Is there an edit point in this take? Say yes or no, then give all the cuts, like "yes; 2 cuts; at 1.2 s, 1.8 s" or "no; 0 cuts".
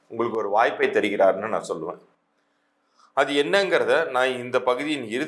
no; 0 cuts